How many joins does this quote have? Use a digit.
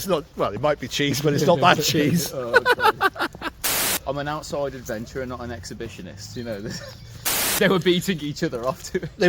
2